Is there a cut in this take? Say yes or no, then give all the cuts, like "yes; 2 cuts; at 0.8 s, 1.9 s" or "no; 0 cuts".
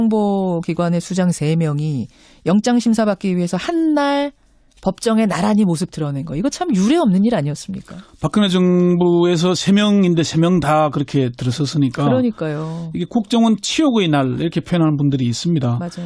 no; 0 cuts